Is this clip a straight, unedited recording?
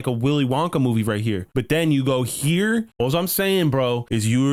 yes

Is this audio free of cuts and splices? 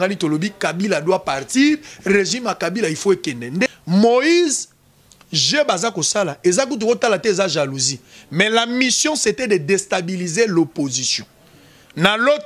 no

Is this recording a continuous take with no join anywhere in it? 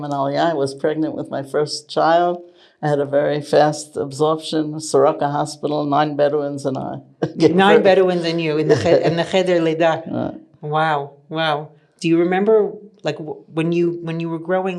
yes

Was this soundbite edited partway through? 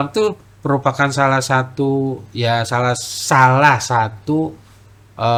no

